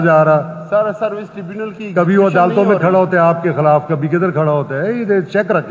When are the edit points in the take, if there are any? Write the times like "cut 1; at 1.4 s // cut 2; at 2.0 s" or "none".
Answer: none